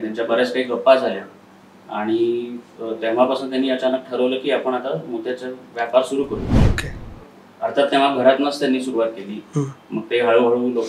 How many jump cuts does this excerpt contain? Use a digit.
0